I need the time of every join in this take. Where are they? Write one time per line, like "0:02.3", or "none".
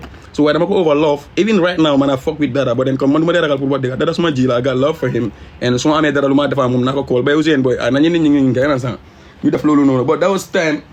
none